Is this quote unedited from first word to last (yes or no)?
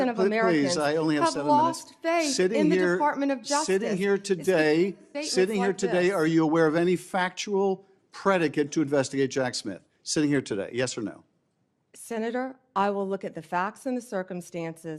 yes